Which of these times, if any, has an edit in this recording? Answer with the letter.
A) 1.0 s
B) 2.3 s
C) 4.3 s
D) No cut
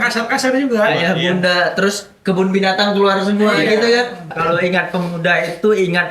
C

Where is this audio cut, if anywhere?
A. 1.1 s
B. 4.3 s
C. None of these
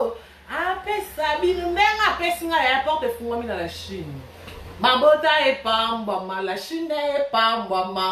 C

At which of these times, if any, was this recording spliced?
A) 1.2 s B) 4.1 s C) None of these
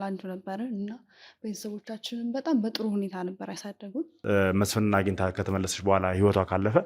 B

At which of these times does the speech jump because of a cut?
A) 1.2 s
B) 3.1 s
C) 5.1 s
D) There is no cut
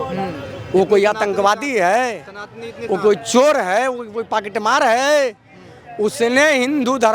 D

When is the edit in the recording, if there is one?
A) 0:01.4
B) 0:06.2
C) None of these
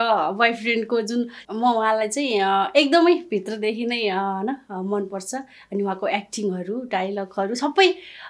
A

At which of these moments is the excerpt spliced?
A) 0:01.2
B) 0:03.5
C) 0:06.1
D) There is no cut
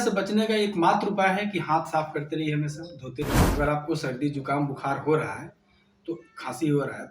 B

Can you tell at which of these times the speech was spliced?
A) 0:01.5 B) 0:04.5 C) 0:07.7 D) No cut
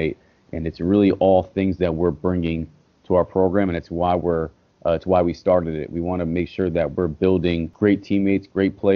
C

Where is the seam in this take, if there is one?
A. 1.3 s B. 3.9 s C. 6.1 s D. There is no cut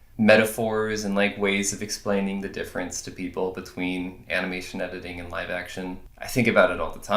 C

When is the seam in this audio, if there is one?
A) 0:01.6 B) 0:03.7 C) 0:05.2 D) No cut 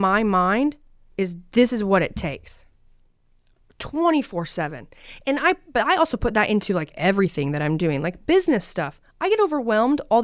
D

